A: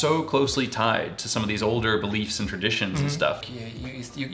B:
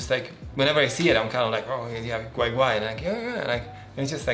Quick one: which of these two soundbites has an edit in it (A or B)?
A